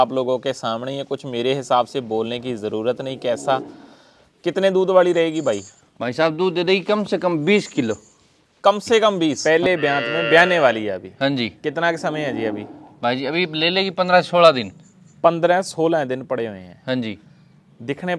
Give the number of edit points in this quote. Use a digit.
1